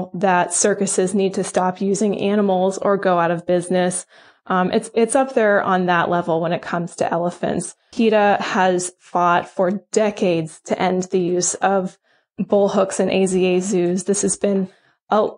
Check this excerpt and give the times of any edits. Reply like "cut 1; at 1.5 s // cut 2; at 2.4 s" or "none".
none

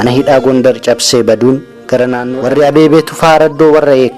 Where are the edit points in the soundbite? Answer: cut 1; at 2.3 s

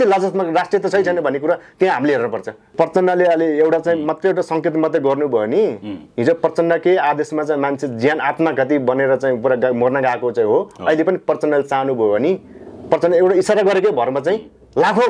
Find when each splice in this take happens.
cut 1; at 2.7 s

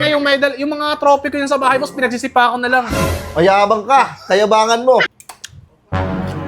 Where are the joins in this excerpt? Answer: cut 1; at 5.2 s

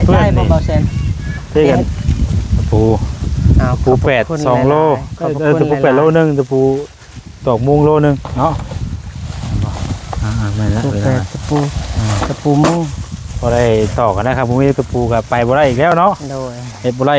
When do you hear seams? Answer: cut 1; at 1.9 s

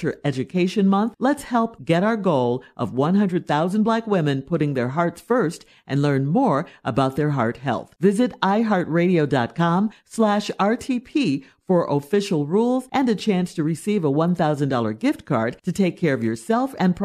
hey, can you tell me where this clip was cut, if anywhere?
none

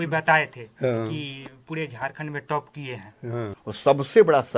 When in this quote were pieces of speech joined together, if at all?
cut 1; at 3.6 s

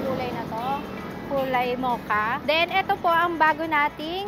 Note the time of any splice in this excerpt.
cut 1; at 2.4 s

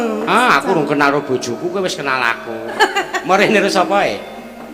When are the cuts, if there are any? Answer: cut 1; at 2.8 s

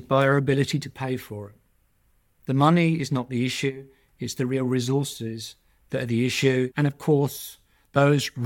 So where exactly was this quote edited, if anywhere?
cut 1; at 6.7 s

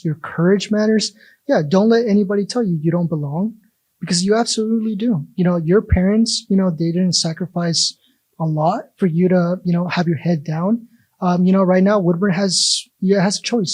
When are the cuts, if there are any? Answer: none

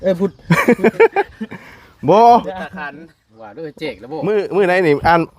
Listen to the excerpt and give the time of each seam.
cut 1; at 4.2 s

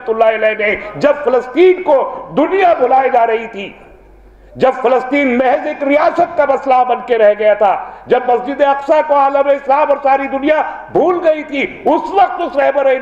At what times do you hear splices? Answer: none

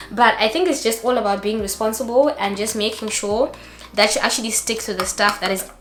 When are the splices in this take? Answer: none

